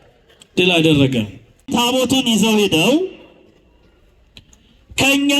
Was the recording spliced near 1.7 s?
yes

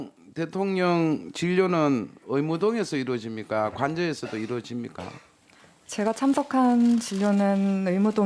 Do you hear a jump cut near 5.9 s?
yes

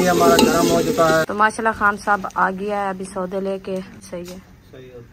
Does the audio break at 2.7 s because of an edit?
no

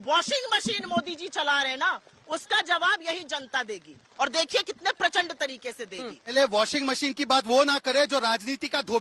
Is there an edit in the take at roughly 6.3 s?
yes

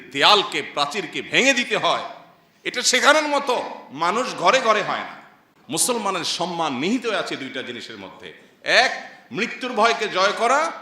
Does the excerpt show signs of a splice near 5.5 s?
yes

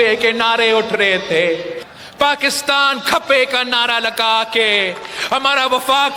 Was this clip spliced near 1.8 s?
yes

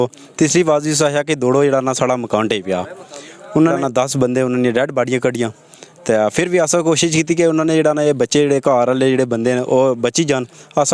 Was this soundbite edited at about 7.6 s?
no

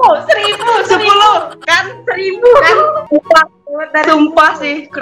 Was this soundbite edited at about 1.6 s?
no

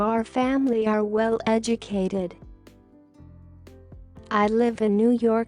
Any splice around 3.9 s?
yes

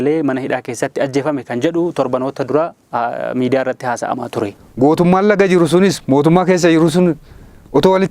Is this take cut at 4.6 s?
yes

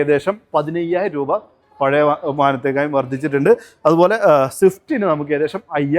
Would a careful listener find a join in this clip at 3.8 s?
no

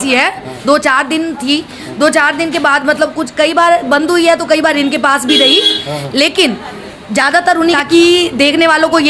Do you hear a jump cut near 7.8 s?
yes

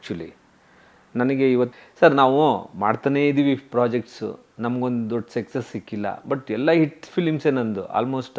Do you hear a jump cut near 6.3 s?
no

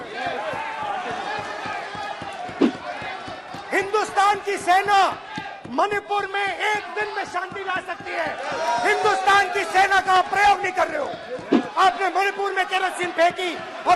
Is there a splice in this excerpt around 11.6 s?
yes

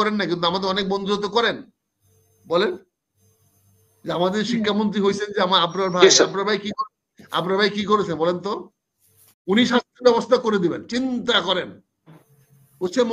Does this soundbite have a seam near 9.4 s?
yes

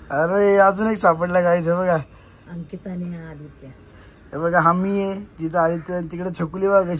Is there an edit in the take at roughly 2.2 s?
no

